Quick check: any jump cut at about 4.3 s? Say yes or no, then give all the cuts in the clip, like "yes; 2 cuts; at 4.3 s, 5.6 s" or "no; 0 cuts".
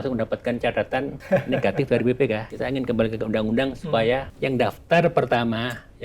yes; 3 cuts; at 1.2 s, 2.5 s, 4.3 s